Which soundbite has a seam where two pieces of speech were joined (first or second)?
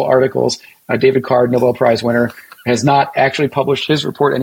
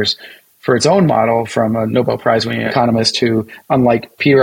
second